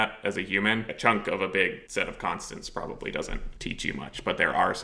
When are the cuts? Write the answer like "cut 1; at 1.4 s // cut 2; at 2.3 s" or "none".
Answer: cut 1; at 0.9 s // cut 2; at 1.8 s // cut 3; at 3.5 s